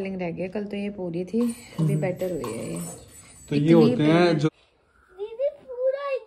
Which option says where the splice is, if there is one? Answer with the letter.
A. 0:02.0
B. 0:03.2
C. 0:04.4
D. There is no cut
C